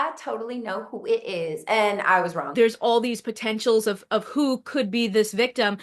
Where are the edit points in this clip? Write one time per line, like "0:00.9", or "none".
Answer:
0:02.4